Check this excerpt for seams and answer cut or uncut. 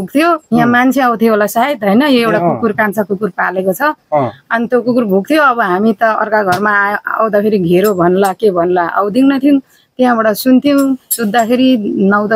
uncut